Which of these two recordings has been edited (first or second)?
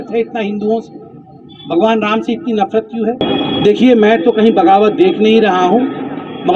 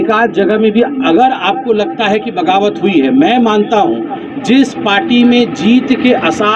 first